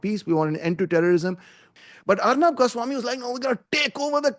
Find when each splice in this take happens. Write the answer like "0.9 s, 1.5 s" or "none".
1.7 s